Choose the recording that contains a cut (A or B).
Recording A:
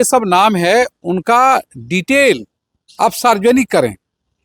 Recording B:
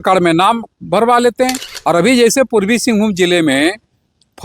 B